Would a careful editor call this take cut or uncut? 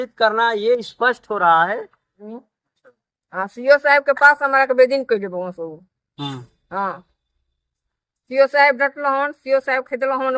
cut